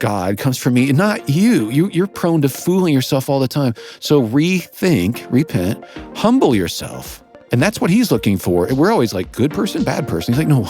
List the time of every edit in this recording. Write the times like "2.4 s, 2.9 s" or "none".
7.8 s

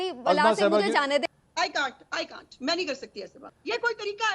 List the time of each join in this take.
1.3 s, 3.4 s

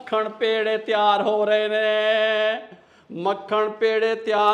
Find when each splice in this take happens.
none

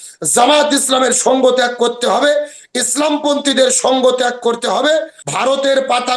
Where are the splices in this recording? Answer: 5.2 s

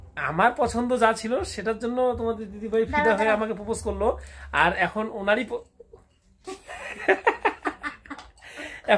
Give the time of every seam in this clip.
none

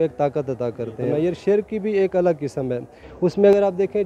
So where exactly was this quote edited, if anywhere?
1.1 s

